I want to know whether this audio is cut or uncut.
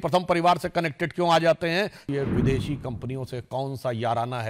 cut